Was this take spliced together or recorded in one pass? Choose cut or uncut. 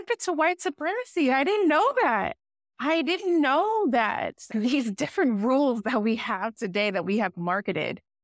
uncut